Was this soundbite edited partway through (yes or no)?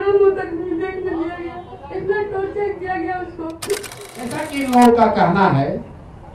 yes